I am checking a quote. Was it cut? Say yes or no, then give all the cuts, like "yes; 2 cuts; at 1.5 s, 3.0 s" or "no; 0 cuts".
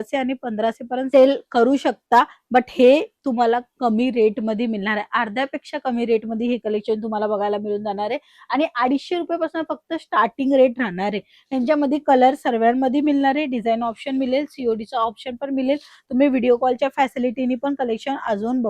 no; 0 cuts